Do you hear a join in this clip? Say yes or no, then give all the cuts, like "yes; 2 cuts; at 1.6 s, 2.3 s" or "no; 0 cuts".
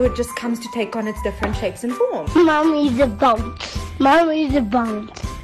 yes; 1 cut; at 2.3 s